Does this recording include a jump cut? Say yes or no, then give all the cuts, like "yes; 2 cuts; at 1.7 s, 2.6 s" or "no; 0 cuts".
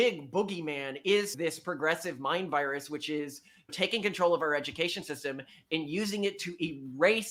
no; 0 cuts